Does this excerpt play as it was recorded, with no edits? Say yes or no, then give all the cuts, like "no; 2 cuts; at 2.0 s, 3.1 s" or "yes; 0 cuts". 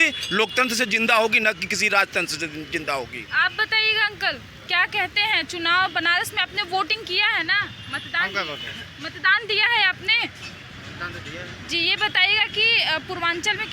yes; 0 cuts